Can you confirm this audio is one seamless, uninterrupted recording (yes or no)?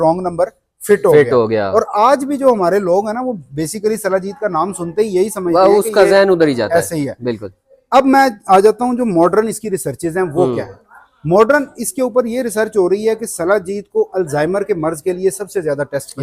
yes